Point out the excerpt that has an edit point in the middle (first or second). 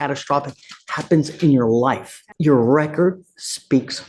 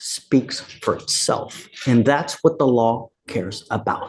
first